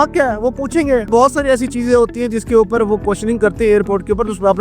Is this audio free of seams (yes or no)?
no